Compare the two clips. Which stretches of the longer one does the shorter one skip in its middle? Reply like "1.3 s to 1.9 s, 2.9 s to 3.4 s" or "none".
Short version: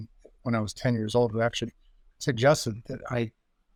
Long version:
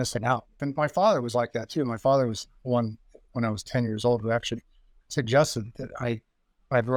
none